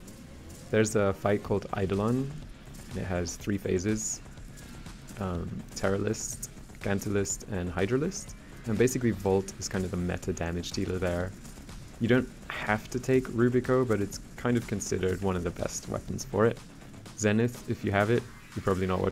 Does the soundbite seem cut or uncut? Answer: uncut